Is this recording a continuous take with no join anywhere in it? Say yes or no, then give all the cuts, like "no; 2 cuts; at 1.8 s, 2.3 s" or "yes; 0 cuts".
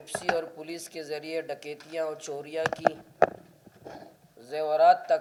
yes; 0 cuts